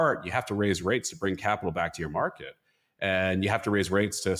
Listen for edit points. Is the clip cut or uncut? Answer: uncut